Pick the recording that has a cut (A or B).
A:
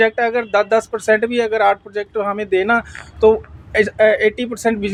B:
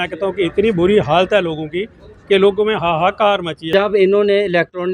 B